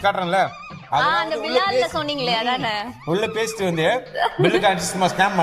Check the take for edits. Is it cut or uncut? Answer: uncut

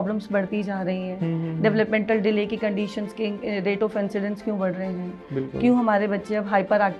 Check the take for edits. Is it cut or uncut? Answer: uncut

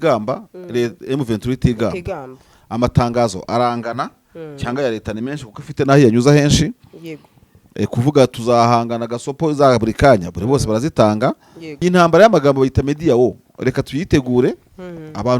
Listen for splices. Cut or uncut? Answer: cut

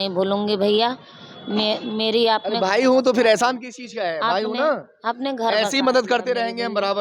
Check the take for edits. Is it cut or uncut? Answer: uncut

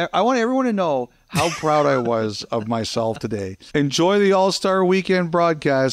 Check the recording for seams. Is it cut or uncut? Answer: cut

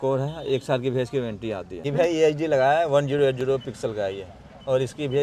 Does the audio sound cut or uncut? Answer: cut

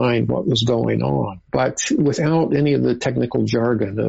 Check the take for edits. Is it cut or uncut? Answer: cut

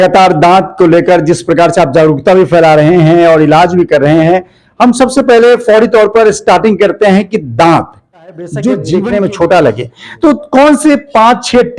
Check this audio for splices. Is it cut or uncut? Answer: cut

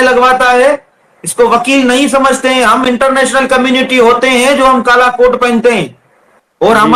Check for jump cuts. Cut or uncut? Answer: uncut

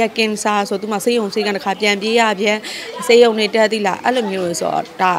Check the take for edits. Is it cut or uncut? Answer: uncut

